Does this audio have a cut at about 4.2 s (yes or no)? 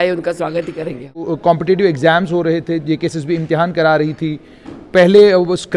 no